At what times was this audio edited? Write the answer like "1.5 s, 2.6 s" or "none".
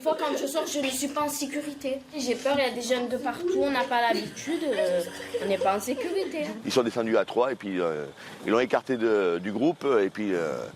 6.6 s